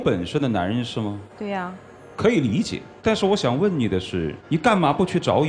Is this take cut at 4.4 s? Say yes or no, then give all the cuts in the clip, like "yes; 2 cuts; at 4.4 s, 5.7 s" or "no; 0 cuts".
yes; 3 cuts; at 1.3 s, 2.8 s, 4.4 s